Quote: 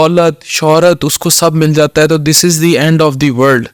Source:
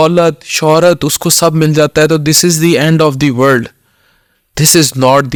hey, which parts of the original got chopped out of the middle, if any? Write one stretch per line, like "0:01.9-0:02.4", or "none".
none